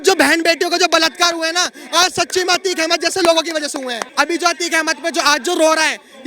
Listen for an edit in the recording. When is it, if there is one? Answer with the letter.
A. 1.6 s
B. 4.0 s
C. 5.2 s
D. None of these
B